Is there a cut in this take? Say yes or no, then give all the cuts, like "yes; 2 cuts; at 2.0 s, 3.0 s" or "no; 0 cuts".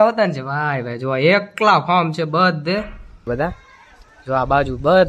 yes; 1 cut; at 3.2 s